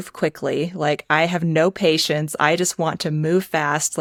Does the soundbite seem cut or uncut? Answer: uncut